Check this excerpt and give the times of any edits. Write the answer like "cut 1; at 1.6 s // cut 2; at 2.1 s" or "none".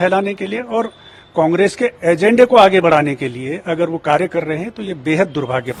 none